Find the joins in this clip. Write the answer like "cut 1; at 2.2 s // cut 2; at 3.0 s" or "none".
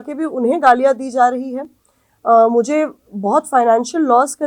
none